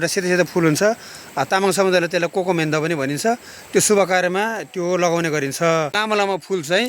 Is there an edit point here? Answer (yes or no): yes